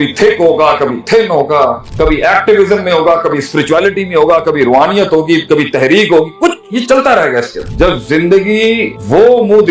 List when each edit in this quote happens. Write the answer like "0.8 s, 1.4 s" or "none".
7.7 s